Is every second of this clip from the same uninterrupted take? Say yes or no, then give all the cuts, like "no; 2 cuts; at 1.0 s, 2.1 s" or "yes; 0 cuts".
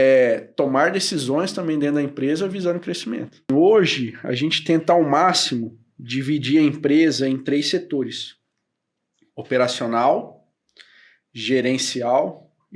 no; 1 cut; at 3.5 s